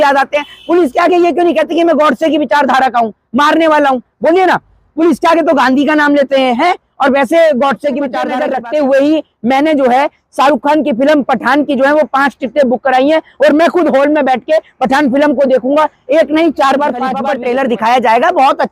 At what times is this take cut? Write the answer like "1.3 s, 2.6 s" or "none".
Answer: 8.4 s, 17.2 s